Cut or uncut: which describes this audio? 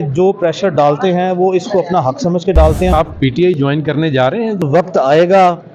cut